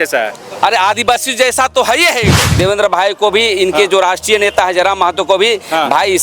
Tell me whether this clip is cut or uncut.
cut